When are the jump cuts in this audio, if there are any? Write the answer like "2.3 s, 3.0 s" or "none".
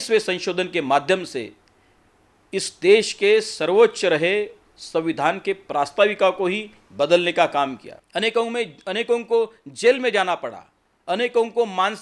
7.9 s

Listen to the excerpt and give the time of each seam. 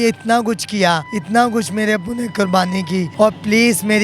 1.1 s, 3.1 s

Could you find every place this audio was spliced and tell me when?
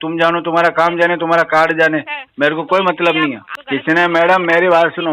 3.5 s

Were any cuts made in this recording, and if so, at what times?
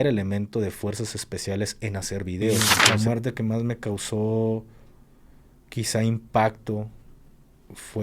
2.7 s

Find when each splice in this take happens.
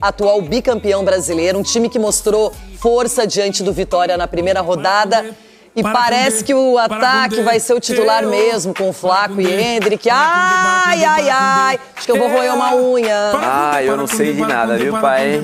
none

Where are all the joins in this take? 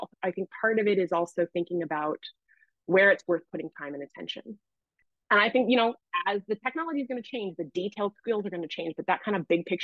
4.7 s

